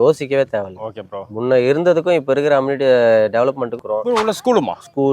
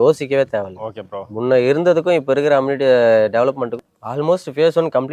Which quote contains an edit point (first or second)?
first